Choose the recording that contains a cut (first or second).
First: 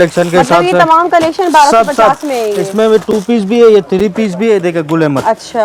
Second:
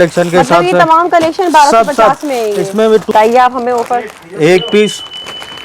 second